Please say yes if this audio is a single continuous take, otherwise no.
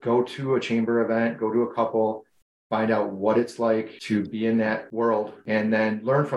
no